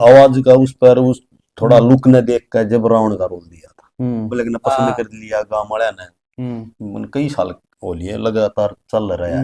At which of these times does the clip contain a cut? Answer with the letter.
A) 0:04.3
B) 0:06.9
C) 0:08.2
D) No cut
A